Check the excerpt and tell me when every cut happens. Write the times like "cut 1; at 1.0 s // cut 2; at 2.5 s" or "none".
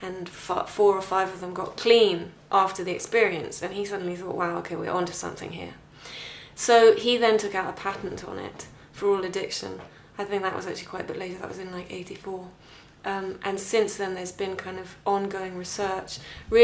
cut 1; at 14.5 s